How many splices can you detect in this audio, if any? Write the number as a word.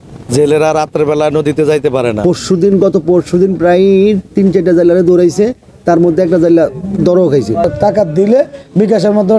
two